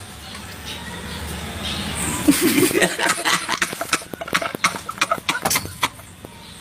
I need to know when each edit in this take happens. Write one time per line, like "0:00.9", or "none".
none